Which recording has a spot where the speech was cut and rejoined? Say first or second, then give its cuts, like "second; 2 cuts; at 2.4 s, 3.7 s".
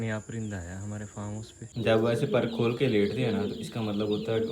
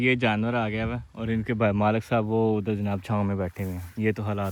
first; 1 cut; at 1.6 s